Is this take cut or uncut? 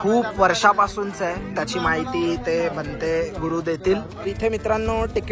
cut